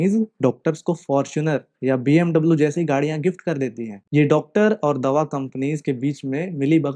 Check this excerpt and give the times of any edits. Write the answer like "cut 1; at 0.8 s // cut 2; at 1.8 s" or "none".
cut 1; at 3.9 s